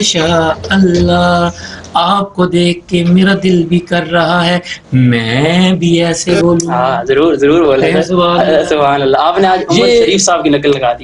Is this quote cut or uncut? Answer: uncut